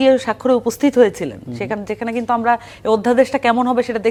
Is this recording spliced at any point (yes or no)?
no